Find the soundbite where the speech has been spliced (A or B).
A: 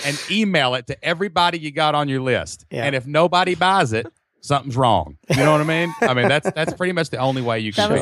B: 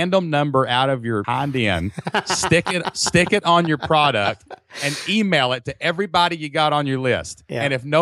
B